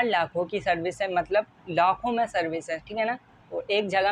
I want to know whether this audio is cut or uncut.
uncut